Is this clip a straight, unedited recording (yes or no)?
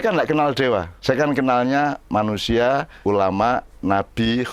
no